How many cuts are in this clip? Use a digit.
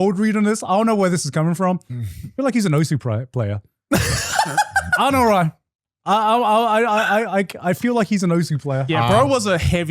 1